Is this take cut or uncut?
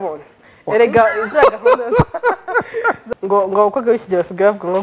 cut